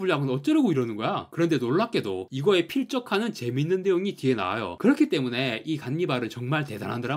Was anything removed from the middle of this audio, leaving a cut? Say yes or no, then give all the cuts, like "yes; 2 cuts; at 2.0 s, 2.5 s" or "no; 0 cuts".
no; 0 cuts